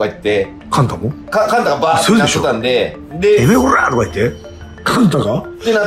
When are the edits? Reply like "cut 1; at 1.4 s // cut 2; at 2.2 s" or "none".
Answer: none